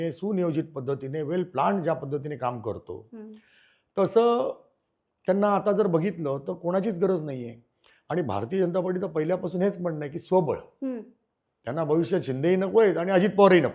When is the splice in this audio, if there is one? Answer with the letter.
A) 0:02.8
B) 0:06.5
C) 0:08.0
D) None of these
D